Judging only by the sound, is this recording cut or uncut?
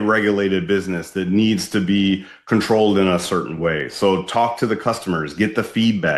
uncut